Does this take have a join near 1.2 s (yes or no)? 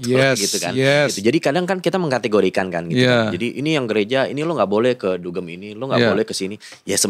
yes